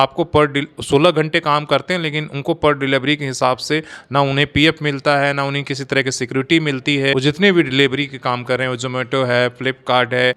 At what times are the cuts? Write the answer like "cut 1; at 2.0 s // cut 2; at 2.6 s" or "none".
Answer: none